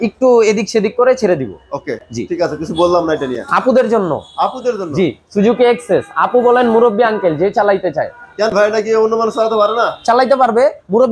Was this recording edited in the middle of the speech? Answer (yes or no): no